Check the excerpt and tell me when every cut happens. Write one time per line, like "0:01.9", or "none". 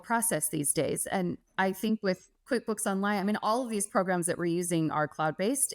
none